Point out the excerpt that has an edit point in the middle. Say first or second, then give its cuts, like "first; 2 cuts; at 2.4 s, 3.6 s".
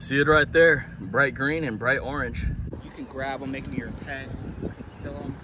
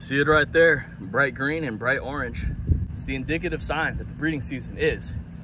first; 1 cut; at 2.6 s